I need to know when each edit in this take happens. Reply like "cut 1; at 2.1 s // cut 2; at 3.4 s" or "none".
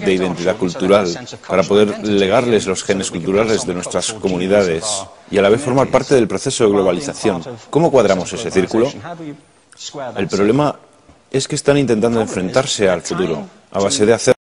cut 1; at 7.8 s